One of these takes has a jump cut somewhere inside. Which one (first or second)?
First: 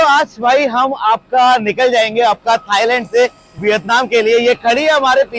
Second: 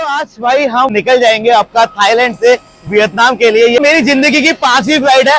second